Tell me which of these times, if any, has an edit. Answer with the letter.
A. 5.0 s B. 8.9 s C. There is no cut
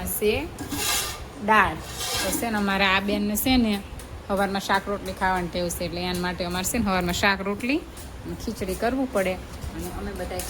B